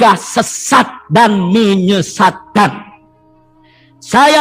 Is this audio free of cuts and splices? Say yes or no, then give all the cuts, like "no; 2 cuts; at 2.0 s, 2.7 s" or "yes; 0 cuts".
yes; 0 cuts